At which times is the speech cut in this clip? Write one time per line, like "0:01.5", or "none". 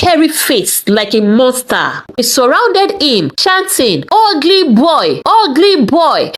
0:02.1